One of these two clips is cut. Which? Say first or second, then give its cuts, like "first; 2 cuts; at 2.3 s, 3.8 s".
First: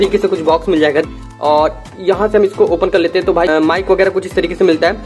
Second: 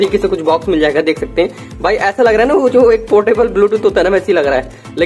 first; 2 cuts; at 1.0 s, 3.5 s